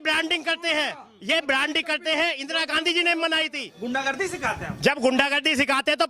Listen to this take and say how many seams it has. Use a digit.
1